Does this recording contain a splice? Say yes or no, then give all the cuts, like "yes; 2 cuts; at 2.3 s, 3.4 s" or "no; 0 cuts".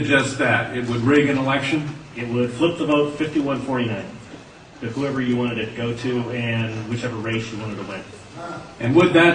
no; 0 cuts